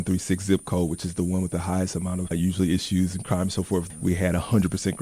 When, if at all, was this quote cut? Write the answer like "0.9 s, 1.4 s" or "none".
3.9 s